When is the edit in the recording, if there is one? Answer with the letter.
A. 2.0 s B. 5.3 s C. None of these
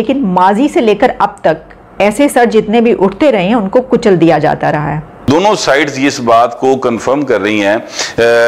B